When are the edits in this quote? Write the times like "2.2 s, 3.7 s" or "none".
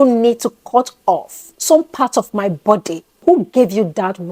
3.2 s